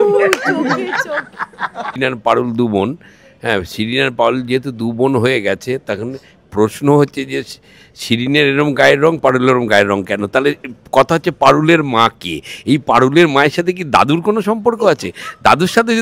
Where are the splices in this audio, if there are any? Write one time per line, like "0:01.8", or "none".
0:02.0